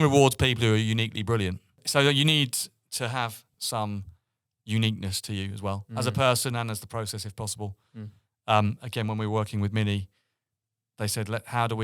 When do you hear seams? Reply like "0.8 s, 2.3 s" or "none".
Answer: 1.8 s, 3.5 s

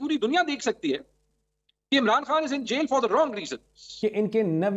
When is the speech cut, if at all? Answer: 3.8 s

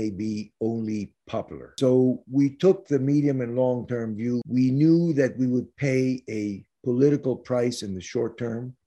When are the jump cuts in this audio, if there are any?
1.7 s, 4.4 s

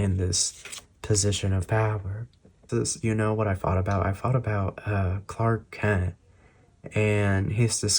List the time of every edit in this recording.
2.7 s

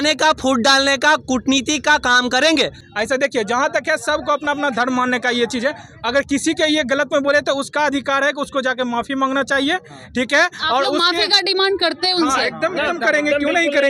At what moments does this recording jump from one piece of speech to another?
2.9 s

